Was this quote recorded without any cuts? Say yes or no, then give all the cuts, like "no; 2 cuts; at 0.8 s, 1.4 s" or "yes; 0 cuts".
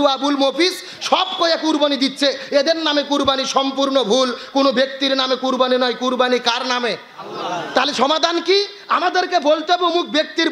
yes; 0 cuts